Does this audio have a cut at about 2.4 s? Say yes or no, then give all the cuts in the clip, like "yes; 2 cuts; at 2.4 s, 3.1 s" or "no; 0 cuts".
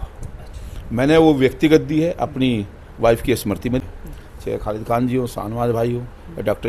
no; 1 cut; at 3.9 s